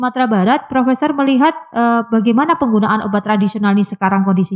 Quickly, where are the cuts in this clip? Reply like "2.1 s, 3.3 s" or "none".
none